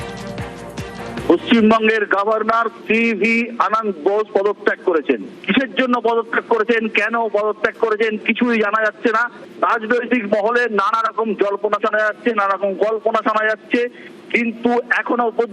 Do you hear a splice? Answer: yes; 1 cut; at 1.2 s

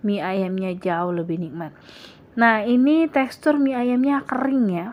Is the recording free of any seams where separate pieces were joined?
yes; 0 cuts

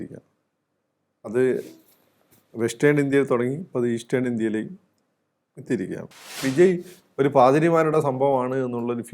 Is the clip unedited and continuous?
no; 1 cut; at 6.4 s

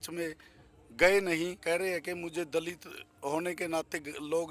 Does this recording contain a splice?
yes; 1 cut; at 1.6 s

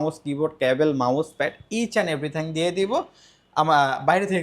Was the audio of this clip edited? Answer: no; 0 cuts

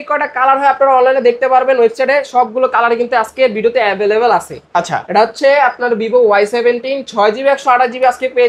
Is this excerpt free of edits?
yes; 0 cuts

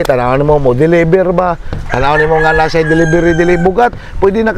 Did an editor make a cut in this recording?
no; 0 cuts

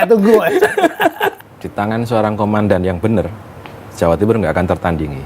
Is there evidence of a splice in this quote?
yes; 1 cut; at 1.4 s

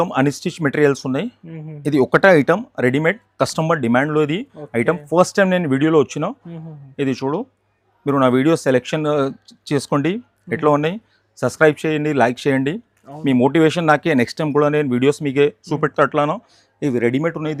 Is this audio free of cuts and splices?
yes; 0 cuts

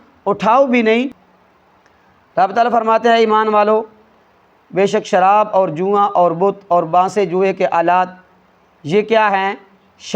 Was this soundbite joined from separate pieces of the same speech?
yes; 1 cut; at 1.2 s

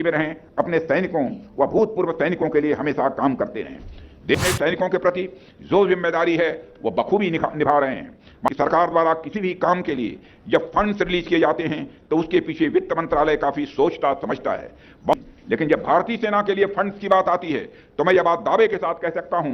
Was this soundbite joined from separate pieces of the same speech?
yes; 3 cuts; at 4.3 s, 8.5 s, 15.1 s

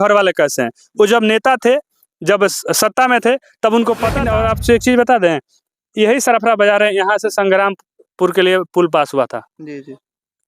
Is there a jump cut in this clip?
yes; 1 cut; at 4.2 s

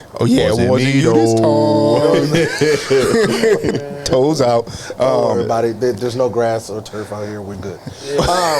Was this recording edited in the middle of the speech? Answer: no; 0 cuts

